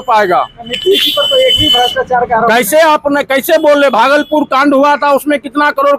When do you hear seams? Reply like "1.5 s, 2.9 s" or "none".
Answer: none